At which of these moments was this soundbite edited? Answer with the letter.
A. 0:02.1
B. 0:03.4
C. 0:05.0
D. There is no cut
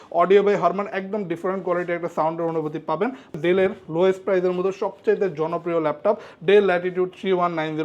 B